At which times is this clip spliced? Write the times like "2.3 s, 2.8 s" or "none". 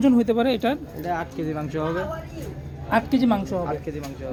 none